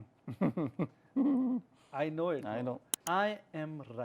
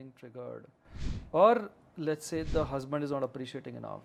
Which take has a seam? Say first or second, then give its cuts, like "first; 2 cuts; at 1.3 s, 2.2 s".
first; 1 cut; at 3.0 s